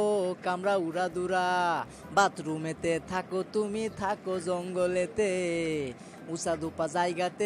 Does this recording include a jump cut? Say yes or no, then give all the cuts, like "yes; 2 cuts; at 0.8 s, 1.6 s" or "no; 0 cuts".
no; 0 cuts